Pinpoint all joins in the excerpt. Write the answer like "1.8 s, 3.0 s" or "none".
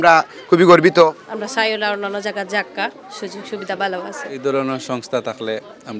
1.2 s, 4.4 s